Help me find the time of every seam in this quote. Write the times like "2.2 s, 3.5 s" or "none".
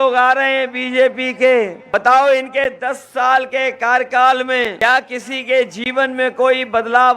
1.8 s, 4.8 s

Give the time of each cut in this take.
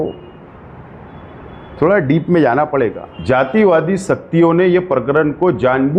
3.1 s

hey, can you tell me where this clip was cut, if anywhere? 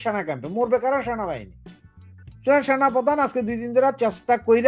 none

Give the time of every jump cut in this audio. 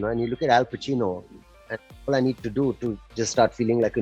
none

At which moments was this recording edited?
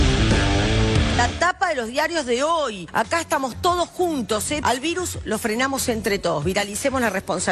1.3 s

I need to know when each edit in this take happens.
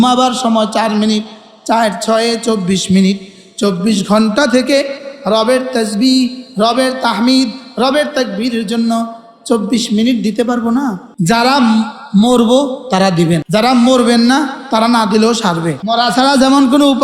11.1 s, 13.4 s, 15.8 s

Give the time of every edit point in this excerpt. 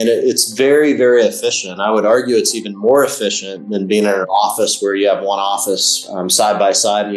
none

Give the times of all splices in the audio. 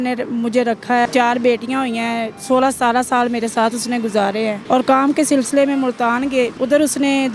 1.1 s, 2.3 s, 4.6 s, 6.5 s

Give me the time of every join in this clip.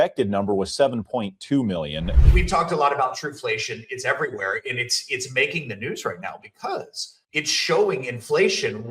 2.1 s

